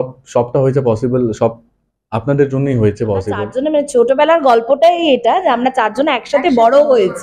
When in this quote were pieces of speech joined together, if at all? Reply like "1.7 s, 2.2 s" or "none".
3.5 s